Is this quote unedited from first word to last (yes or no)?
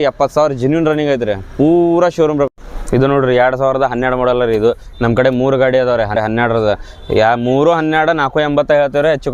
no